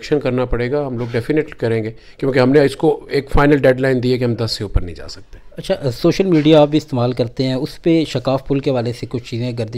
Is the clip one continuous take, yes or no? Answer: yes